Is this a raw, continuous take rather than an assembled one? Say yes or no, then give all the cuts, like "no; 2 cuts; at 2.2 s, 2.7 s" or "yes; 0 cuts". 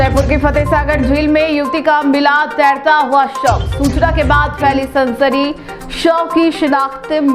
yes; 0 cuts